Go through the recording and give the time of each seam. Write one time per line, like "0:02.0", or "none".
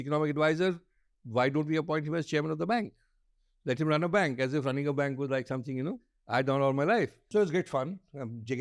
0:07.2